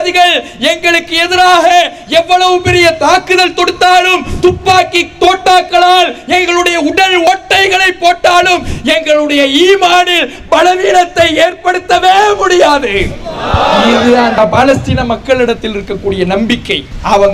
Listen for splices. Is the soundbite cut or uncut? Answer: uncut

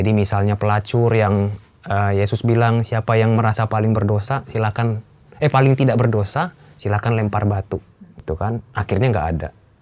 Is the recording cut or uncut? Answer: cut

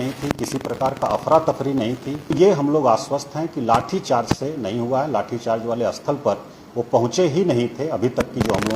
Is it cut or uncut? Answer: cut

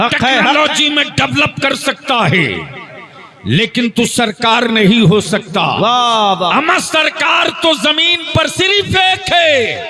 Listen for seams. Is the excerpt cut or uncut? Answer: uncut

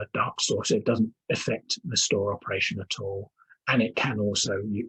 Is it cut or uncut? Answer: uncut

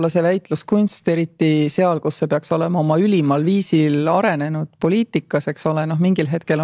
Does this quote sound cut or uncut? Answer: uncut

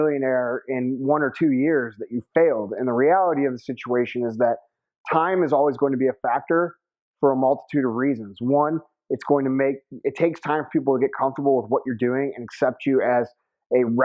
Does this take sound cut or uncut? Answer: cut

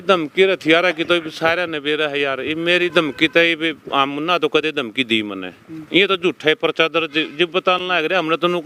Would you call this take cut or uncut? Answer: uncut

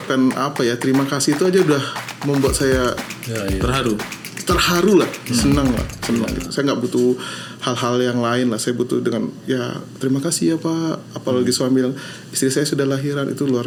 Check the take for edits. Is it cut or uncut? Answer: uncut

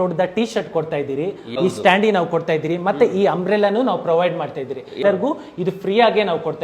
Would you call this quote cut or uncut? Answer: cut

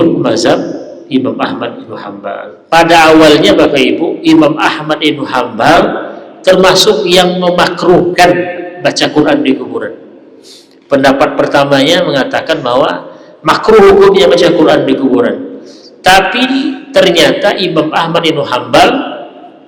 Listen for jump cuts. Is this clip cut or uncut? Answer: cut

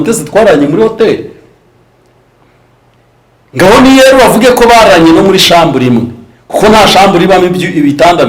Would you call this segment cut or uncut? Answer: uncut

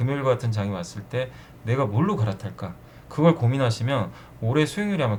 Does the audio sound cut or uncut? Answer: uncut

